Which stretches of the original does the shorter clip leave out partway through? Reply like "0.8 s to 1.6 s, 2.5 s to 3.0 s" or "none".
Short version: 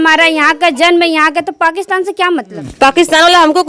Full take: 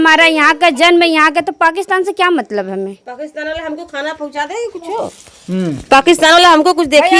2.6 s to 5.7 s